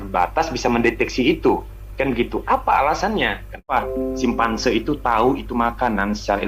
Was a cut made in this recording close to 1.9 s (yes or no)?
no